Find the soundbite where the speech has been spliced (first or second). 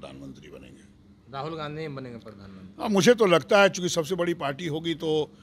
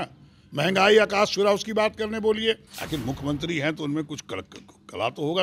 second